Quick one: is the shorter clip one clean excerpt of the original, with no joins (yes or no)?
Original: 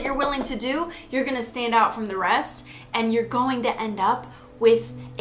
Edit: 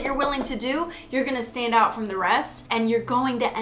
no